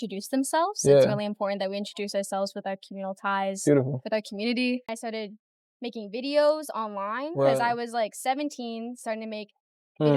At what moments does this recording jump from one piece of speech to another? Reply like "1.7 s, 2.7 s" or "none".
4.9 s